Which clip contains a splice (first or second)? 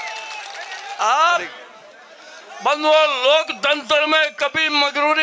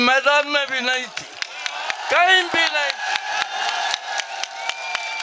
first